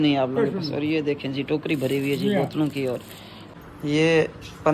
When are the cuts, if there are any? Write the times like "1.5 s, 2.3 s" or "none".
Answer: 3.5 s

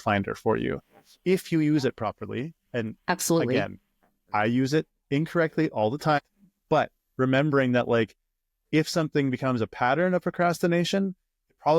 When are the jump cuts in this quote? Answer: 6.2 s

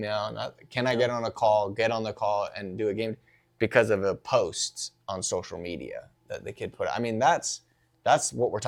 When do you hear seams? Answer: none

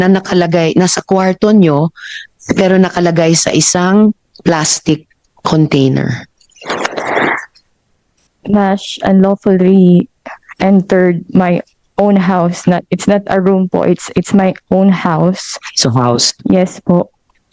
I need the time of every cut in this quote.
none

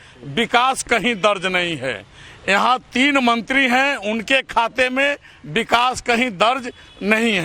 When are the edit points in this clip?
none

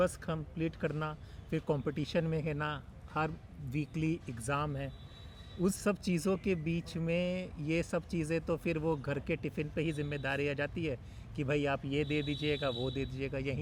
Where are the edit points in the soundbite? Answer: none

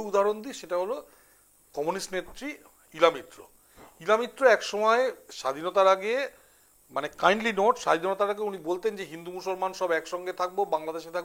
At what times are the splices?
none

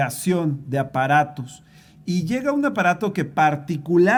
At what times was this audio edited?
none

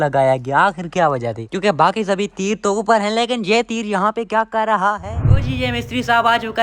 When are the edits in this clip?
5.5 s

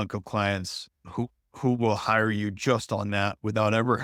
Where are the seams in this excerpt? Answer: none

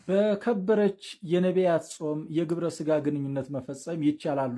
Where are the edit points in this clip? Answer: none

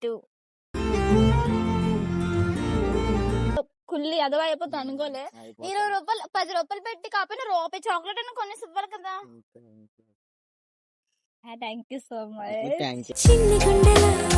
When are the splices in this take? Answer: 3.5 s

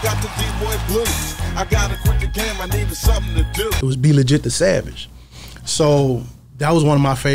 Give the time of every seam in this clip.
none

